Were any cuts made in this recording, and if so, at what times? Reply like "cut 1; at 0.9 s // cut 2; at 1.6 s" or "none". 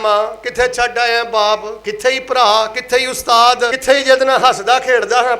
cut 1; at 3.8 s